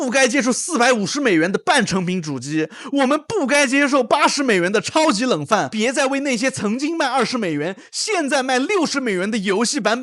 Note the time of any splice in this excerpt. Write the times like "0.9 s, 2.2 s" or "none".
5.7 s